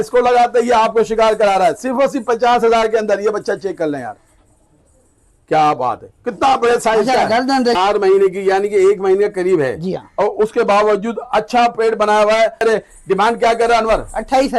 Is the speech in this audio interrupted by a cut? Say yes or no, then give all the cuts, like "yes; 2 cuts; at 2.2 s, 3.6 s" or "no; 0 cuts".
yes; 2 cuts; at 7.8 s, 12.6 s